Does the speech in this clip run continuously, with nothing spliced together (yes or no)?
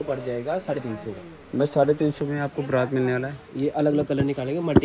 yes